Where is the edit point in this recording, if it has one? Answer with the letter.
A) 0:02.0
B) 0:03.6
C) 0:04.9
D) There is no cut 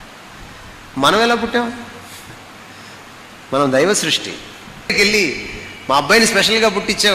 C